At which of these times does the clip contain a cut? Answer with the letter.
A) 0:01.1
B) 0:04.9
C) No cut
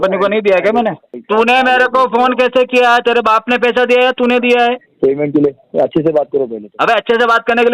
A